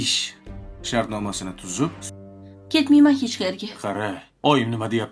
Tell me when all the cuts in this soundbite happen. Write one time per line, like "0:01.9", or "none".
0:01.9